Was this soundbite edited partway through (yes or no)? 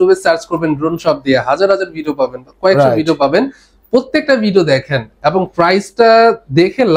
no